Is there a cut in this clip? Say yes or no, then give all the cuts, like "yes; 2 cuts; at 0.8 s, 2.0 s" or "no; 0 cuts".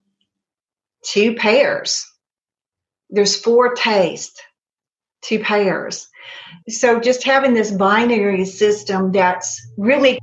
no; 0 cuts